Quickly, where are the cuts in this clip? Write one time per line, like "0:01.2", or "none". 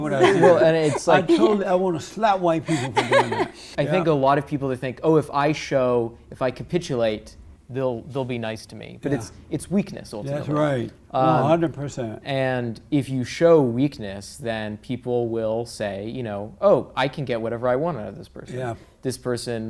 0:03.7